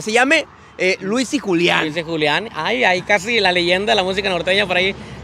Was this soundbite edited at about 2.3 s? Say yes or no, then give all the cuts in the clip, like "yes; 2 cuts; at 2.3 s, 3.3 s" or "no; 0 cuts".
no; 0 cuts